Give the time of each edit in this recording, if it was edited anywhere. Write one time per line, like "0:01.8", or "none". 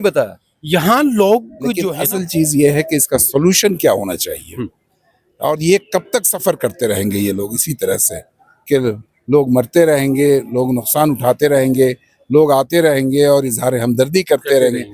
0:01.8